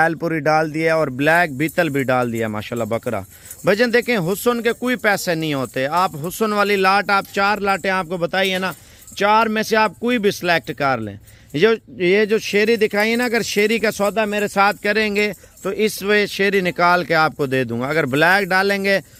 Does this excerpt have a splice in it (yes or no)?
no